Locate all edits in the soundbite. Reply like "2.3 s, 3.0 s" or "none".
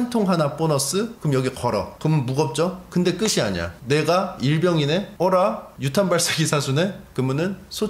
1.2 s, 1.9 s, 2.8 s, 3.7 s, 5.1 s, 5.7 s, 7.0 s